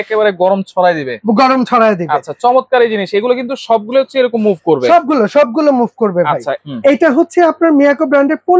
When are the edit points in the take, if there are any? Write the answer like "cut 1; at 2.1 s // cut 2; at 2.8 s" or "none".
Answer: cut 1; at 6.6 s